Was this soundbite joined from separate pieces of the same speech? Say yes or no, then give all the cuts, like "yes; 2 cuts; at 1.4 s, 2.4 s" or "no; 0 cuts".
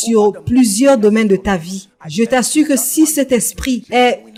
no; 0 cuts